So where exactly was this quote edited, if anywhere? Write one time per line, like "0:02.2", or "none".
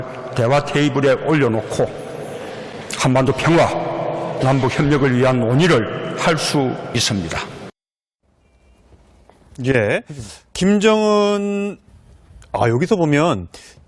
0:04.2